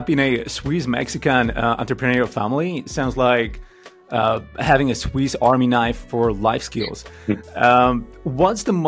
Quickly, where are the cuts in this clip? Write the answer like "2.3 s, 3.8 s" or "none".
none